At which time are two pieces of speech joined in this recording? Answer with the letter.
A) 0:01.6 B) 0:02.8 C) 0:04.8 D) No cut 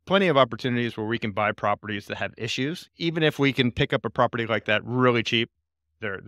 B